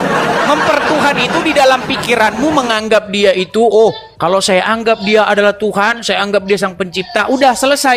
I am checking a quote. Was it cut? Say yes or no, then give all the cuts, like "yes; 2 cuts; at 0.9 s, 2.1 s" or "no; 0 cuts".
no; 0 cuts